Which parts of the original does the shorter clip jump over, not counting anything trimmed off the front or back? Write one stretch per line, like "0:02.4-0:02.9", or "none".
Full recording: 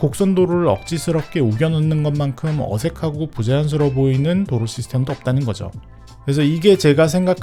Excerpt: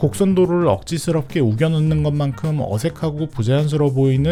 none